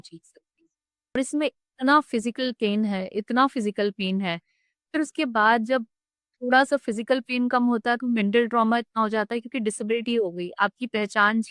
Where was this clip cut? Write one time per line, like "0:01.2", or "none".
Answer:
0:01.2

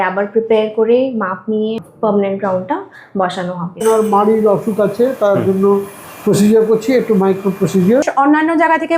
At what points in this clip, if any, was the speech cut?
0:01.8
0:03.8
0:08.1

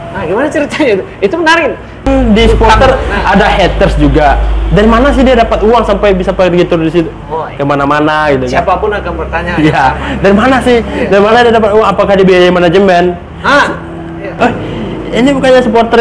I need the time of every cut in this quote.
0:02.1
0:14.4

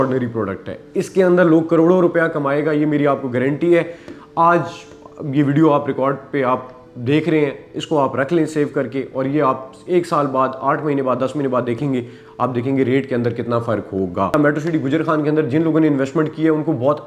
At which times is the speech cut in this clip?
0:14.3

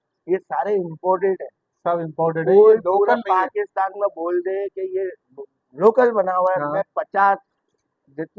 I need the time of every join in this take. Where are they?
none

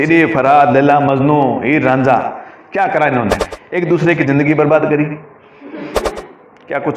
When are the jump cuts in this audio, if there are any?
0:03.5
0:06.0

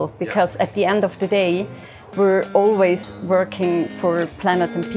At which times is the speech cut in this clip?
none

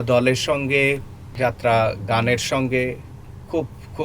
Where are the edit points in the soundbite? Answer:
0:01.2

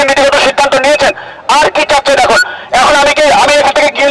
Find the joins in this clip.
none

